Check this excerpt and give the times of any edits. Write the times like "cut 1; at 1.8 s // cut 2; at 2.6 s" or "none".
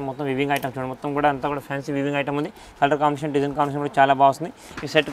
none